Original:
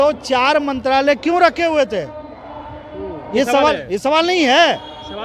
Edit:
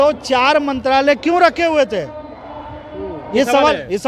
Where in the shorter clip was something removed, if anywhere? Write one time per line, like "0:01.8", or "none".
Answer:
none